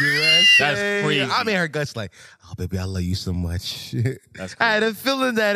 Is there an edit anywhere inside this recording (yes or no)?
yes